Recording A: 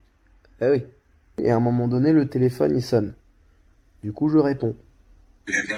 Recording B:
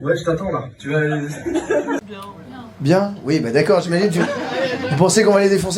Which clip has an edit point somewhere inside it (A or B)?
B